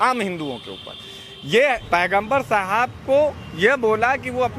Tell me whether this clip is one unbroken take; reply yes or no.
no